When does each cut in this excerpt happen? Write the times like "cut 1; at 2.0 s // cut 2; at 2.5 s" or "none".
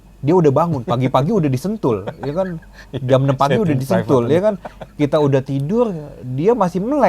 none

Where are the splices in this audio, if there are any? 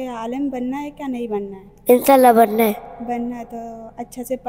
cut 1; at 1.6 s

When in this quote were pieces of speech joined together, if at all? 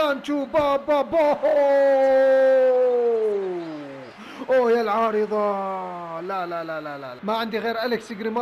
cut 1; at 7.1 s

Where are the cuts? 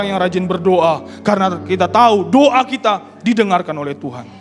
none

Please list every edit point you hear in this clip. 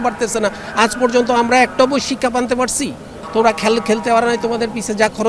cut 1; at 3.2 s

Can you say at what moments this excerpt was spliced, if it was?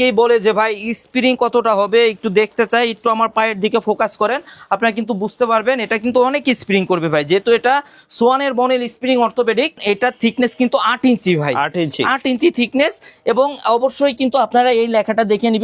cut 1; at 9.8 s

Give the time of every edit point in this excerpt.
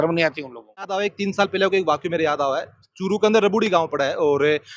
cut 1; at 0.9 s

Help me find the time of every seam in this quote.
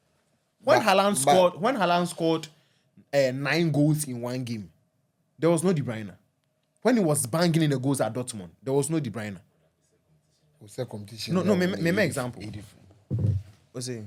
none

